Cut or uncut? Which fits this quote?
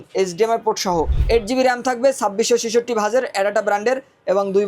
cut